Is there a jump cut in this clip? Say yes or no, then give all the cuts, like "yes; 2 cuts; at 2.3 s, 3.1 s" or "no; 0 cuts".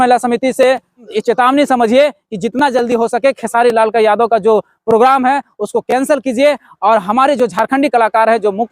yes; 1 cut; at 1.1 s